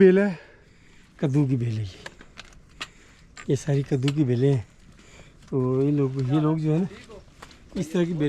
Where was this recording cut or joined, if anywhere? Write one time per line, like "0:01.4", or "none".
none